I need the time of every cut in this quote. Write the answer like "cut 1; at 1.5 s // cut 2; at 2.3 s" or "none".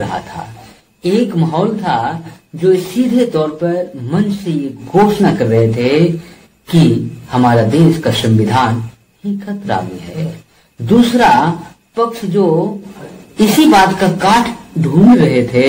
none